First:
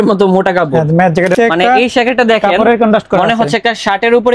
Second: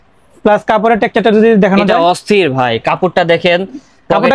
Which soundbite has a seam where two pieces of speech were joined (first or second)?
first